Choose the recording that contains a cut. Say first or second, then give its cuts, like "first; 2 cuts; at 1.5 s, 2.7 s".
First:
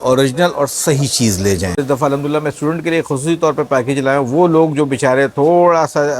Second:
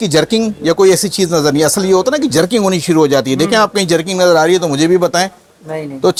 first; 1 cut; at 1.8 s